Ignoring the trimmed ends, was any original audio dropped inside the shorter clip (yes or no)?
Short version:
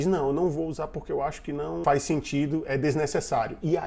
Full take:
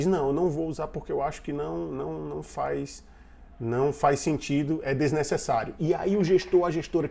yes